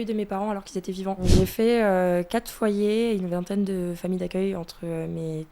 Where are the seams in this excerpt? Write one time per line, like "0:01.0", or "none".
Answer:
0:01.2